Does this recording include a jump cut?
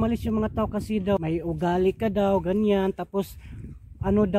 yes; 1 cut; at 1.2 s

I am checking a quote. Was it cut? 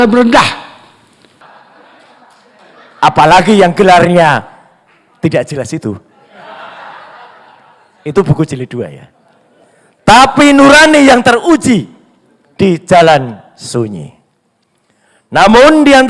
yes; 1 cut; at 1.4 s

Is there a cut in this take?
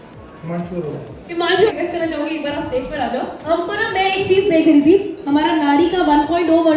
no; 0 cuts

